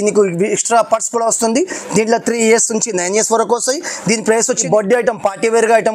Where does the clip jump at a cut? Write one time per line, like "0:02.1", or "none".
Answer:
0:04.6